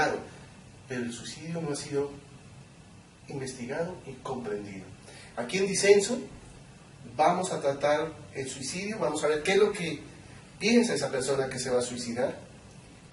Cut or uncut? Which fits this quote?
uncut